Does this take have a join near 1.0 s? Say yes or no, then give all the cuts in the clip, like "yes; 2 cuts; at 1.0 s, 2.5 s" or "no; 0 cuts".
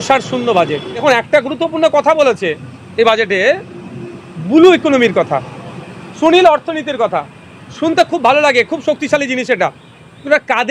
yes; 1 cut; at 1.0 s